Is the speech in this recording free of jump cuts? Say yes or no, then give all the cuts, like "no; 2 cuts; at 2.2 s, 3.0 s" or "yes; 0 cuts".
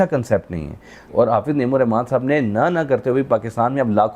no; 1 cut; at 1.0 s